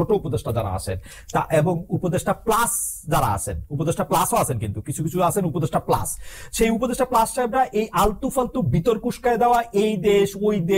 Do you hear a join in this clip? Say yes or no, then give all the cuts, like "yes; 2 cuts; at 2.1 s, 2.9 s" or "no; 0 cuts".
no; 0 cuts